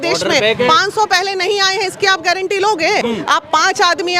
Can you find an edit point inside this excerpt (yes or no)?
yes